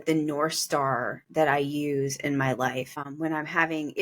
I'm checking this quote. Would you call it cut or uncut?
cut